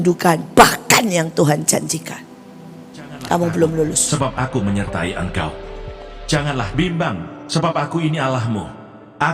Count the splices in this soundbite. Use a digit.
1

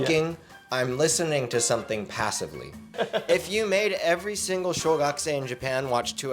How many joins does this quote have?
1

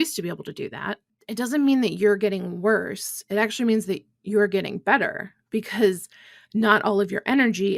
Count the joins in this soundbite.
0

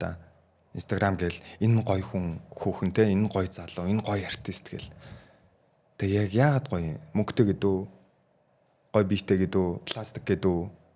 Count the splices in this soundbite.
0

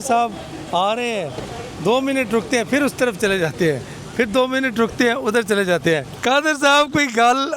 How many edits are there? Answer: 1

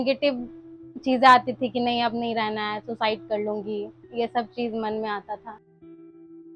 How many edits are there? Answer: 1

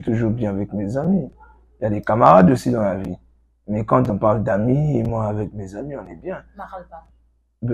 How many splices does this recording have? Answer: 0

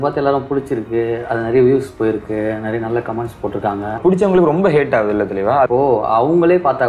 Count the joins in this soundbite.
2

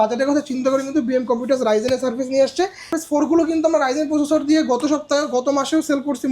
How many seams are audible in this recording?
1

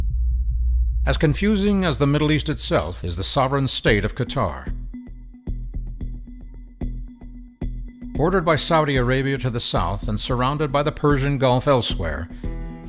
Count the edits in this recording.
1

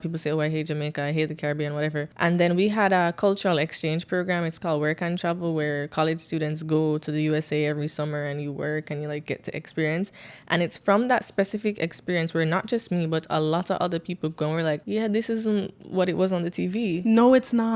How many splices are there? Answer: 2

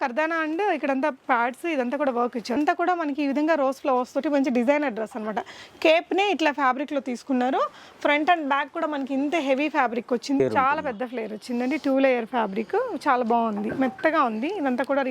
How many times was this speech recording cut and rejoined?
2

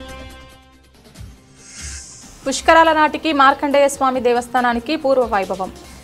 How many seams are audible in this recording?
1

